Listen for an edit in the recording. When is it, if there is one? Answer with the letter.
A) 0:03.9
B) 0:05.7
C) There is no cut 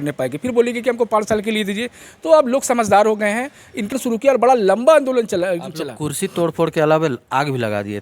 A